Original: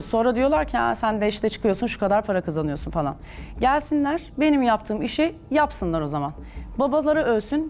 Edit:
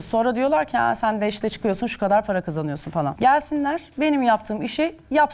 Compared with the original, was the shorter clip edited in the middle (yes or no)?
yes